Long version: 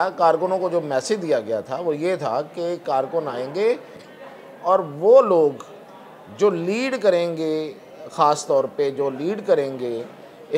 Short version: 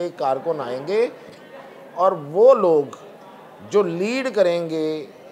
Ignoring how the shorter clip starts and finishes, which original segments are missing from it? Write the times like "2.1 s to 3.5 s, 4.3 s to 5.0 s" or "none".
none